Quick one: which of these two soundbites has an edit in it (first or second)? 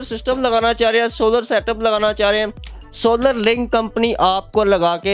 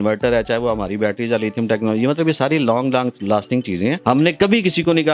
second